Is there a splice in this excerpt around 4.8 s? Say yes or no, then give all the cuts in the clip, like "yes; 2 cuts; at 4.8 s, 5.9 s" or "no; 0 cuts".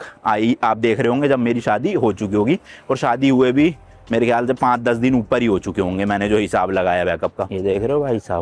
no; 1 cut; at 7.5 s